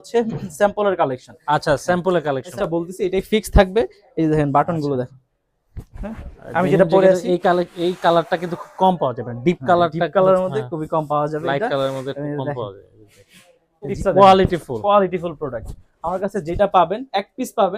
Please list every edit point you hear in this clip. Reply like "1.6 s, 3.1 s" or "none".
2.5 s, 14.0 s